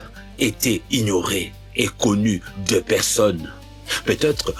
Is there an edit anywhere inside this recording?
no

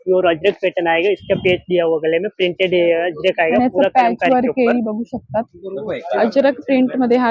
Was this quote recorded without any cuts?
yes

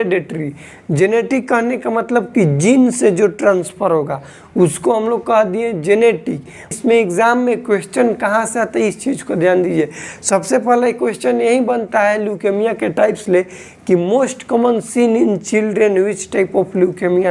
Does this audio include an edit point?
yes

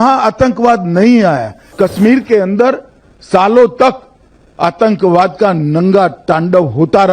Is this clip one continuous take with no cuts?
no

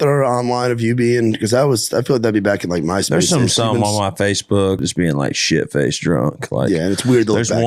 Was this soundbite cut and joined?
yes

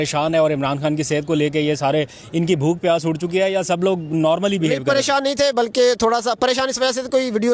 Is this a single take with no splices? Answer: yes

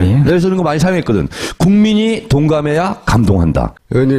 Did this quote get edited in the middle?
yes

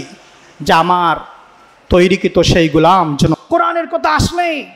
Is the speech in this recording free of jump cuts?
no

